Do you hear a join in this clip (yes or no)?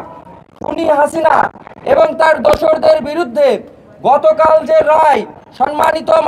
no